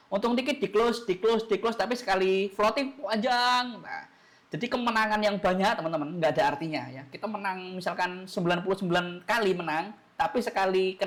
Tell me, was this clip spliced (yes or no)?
no